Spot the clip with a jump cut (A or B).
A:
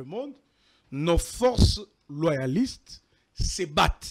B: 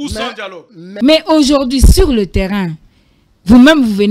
B